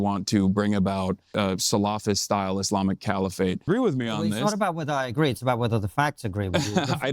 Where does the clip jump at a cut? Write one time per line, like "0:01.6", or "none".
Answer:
0:01.2
0:03.6

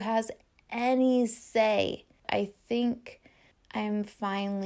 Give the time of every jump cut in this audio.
0:02.2

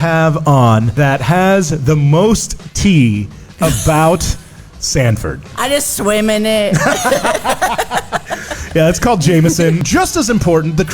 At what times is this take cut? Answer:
0:00.9
0:05.5
0:09.8

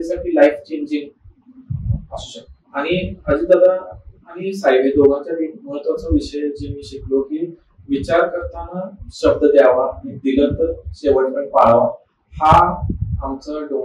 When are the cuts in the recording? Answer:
0:02.5

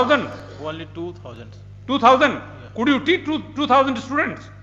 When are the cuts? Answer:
none

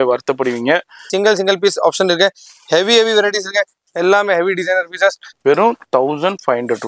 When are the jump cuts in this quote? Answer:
0:01.1
0:05.3

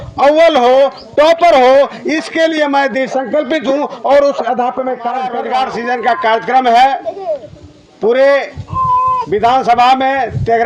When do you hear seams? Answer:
0:05.3

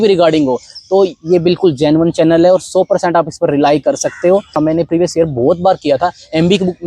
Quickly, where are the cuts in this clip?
0:04.6

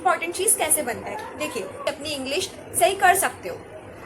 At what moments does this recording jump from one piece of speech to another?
0:01.8

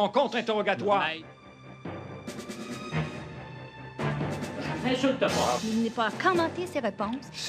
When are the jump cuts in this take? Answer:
0:01.1

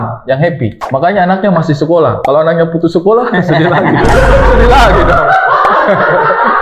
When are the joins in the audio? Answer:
none

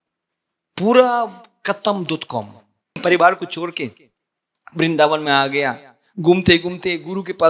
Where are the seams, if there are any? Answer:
0:03.0

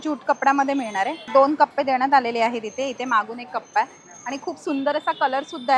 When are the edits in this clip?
0:01.3

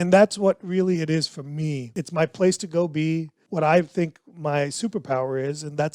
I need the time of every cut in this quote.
0:01.9
0:03.4

